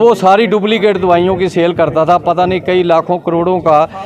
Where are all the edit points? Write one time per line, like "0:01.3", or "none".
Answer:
none

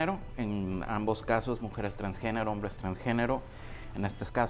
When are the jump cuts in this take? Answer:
none

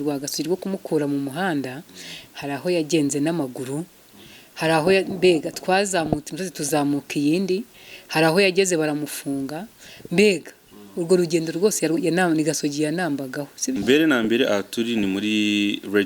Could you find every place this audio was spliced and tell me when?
0:13.8

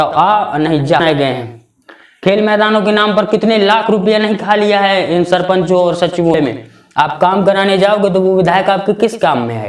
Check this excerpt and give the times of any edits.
0:01.0
0:06.3

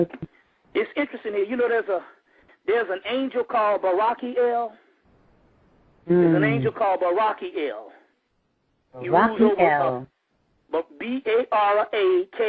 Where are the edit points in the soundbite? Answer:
0:07.9

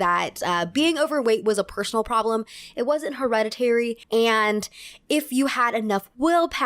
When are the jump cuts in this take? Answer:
0:04.0

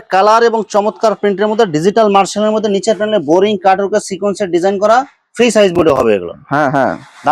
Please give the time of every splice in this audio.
none

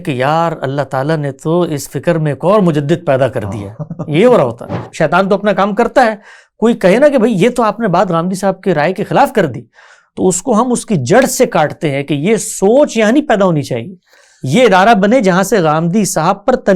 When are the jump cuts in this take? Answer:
0:04.9

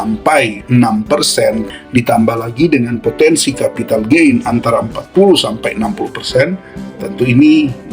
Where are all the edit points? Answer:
0:01.7

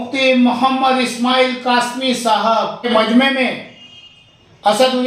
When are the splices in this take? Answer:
0:02.9

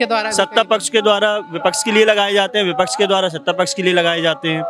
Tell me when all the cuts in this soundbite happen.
none

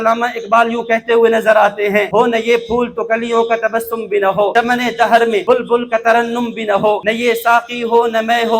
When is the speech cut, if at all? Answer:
0:02.1
0:04.5
0:05.4
0:07.0

